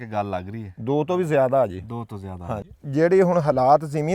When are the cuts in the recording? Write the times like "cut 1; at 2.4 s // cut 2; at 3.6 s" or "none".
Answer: cut 1; at 2.7 s